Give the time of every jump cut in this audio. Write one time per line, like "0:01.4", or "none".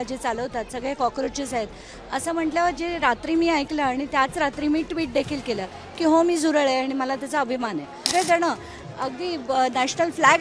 0:08.1